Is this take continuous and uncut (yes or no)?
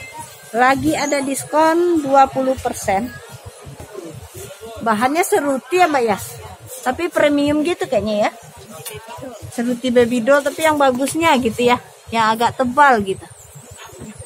no